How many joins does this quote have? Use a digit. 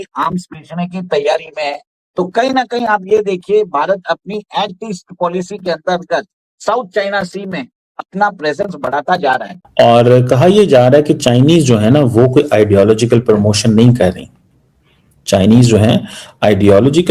1